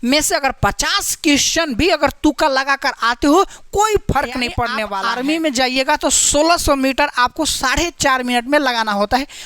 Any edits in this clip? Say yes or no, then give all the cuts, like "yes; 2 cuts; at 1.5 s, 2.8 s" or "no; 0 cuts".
yes; 1 cut; at 4.9 s